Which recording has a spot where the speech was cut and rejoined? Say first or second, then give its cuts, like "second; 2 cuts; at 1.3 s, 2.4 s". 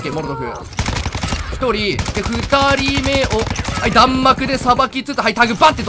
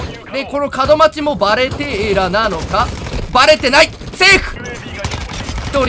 second; 1 cut; at 4.7 s